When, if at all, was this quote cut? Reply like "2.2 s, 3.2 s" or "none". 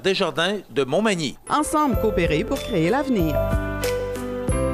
none